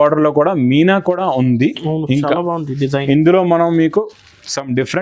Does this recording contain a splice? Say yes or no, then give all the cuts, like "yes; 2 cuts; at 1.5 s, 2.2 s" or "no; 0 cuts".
no; 0 cuts